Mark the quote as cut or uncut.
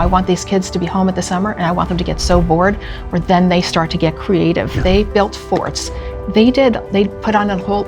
cut